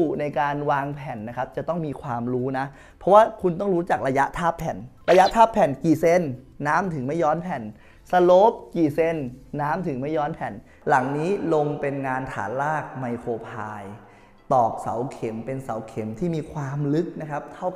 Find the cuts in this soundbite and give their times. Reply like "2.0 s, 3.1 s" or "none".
10.7 s